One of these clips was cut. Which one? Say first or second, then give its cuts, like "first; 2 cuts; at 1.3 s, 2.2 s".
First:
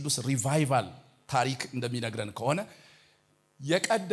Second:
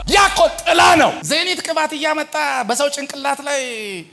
second; 1 cut; at 1.2 s